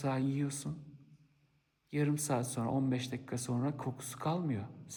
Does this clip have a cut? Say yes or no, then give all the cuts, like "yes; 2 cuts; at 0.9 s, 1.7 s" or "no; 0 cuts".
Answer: no; 0 cuts